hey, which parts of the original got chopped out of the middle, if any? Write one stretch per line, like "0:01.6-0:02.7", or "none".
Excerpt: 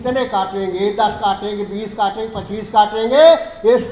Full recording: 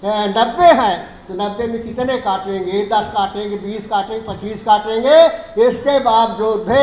none